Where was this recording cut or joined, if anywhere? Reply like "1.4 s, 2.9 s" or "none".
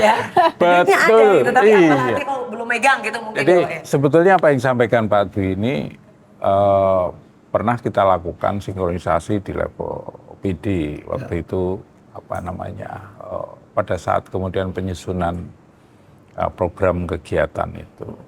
none